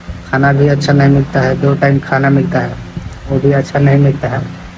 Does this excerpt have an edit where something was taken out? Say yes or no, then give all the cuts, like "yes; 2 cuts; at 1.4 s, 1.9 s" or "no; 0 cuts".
no; 0 cuts